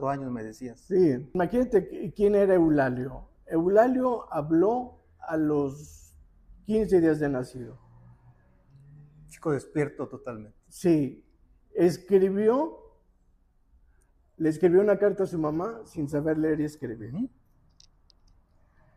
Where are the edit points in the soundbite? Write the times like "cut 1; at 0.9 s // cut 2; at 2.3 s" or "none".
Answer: cut 1; at 1.3 s